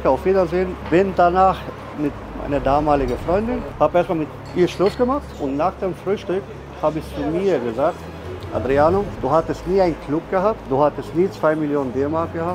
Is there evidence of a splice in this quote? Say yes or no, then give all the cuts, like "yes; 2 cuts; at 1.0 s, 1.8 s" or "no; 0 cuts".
yes; 2 cuts; at 1.9 s, 3.7 s